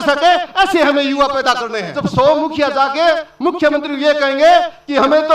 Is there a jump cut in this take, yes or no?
yes